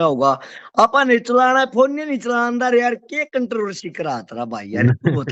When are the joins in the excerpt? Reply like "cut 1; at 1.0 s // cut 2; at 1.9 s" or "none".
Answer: none

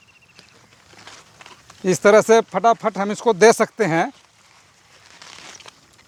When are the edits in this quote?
none

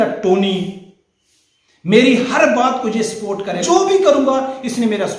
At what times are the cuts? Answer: cut 1; at 3.6 s

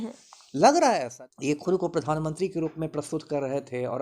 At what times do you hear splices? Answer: cut 1; at 1.1 s

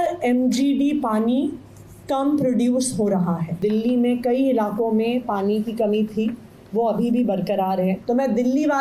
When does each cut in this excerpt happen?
cut 1; at 3.6 s // cut 2; at 8.0 s

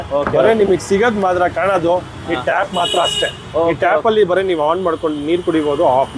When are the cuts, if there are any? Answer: none

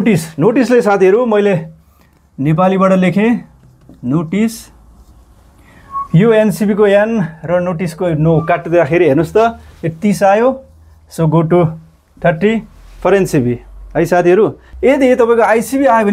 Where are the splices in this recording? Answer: cut 1; at 14.7 s

